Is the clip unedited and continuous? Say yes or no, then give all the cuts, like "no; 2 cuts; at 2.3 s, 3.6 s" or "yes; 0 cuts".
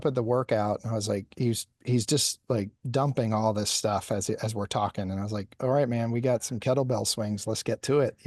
yes; 0 cuts